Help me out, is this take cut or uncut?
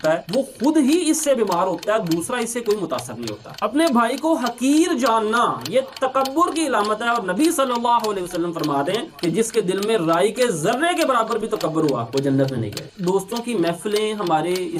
cut